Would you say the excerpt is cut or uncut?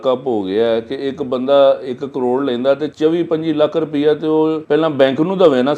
cut